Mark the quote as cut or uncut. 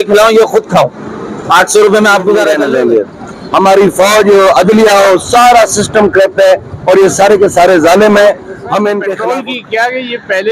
cut